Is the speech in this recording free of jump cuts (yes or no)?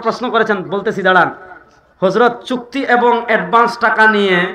yes